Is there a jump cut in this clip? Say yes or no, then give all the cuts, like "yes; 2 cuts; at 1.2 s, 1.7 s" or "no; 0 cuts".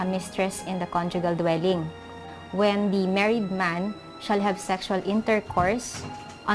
yes; 1 cut; at 5.1 s